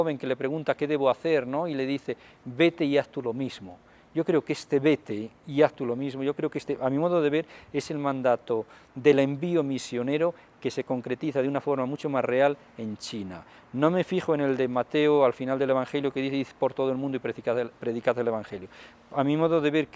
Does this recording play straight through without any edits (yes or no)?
yes